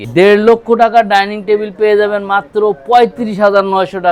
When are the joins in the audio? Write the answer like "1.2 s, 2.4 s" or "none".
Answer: none